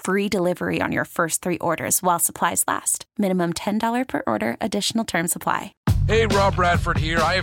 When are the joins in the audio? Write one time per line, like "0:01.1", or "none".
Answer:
0:05.7